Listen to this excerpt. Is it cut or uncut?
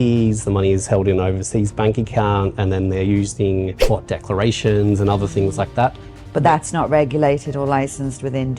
cut